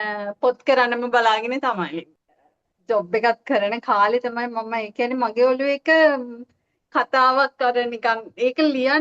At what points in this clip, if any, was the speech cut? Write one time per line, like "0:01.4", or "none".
0:02.2

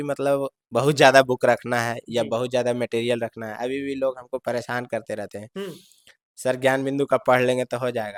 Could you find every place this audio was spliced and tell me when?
none

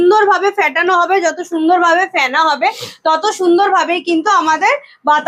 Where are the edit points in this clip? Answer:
none

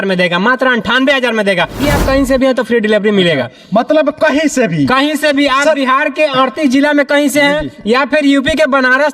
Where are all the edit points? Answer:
0:01.8

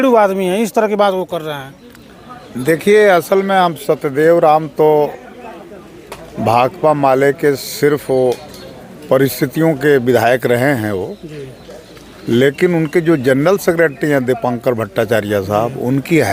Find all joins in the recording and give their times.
none

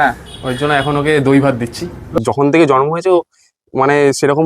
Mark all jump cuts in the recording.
0:02.2

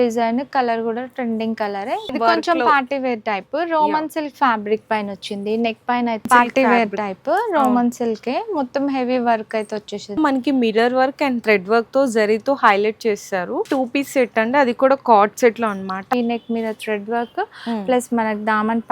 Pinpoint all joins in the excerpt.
0:02.1
0:06.3
0:10.2
0:13.7
0:16.1

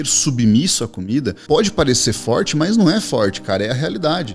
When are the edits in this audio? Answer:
0:01.4

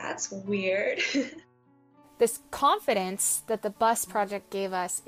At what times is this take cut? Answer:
0:01.9

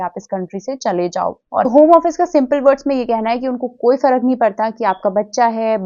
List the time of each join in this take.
0:01.6

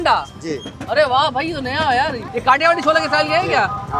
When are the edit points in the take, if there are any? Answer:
0:02.3

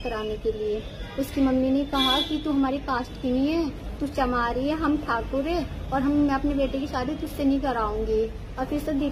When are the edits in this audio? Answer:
none

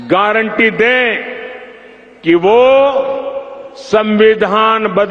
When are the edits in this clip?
none

